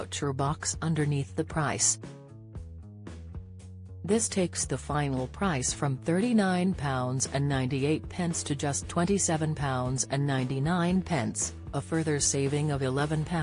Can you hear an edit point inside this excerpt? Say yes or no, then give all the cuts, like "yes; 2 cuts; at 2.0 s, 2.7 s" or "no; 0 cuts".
yes; 2 cuts; at 1.9 s, 4.0 s